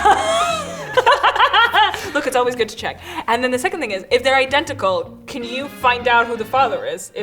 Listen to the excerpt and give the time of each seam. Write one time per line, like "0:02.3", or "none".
none